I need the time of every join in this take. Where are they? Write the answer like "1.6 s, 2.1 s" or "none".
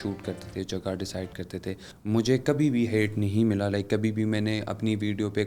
1.9 s